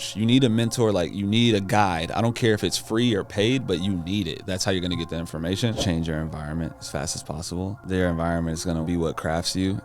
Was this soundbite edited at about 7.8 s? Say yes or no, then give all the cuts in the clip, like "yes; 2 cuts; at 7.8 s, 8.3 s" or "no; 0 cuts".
yes; 3 cuts; at 5.8 s, 7.8 s, 8.8 s